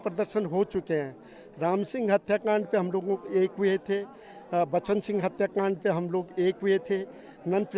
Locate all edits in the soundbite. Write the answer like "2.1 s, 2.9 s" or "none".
none